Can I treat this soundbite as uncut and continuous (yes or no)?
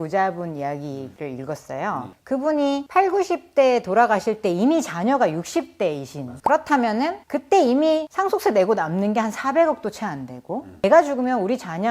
no